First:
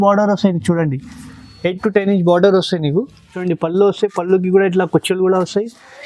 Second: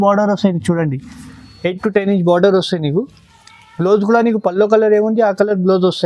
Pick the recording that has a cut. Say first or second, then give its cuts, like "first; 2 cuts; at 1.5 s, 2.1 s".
first; 1 cut; at 3.4 s